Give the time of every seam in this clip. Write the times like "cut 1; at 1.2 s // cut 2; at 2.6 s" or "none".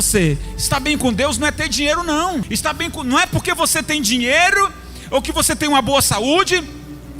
cut 1; at 2.5 s

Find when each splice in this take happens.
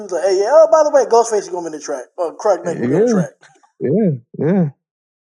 cut 1; at 2.8 s

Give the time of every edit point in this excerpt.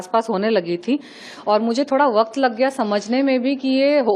none

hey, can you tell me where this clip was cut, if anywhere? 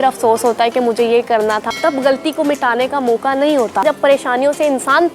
cut 1; at 1.7 s // cut 2; at 3.8 s

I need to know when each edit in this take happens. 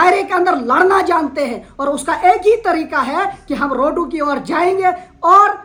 none

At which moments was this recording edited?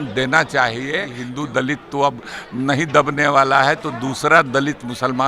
cut 1; at 1.2 s

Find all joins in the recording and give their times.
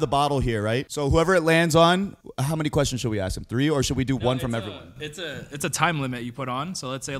cut 1; at 0.9 s // cut 2; at 2.3 s

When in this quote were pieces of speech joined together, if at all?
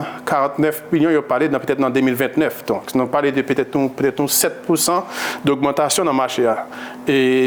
none

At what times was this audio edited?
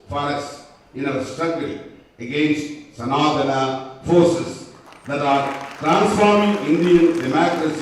none

